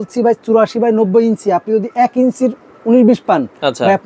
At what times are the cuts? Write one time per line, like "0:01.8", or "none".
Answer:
none